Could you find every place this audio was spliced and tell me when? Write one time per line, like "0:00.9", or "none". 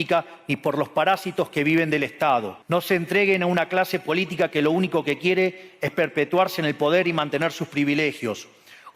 0:02.6